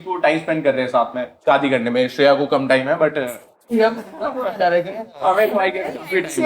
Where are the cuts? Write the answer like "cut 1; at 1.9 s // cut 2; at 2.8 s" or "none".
cut 1; at 1.2 s

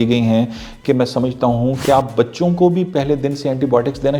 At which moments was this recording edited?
cut 1; at 1.8 s

